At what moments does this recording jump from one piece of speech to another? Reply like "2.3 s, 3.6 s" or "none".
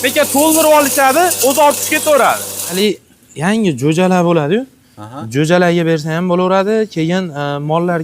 2.7 s